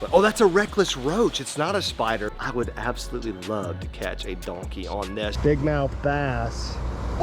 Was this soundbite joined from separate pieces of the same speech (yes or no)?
yes